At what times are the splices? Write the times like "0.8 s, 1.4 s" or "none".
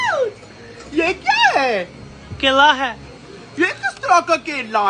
none